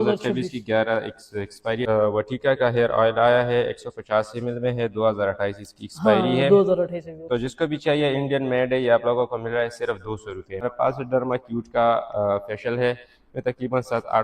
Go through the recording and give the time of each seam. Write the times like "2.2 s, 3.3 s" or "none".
1.8 s, 3.5 s, 10.6 s